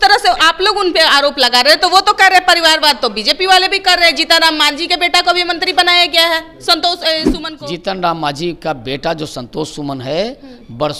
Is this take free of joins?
no; 1 cut; at 7.4 s

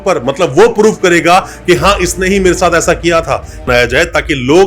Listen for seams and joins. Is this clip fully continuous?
no; 1 cut; at 3.6 s

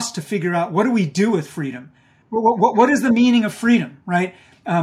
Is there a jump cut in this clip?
yes; 1 cut; at 2.2 s

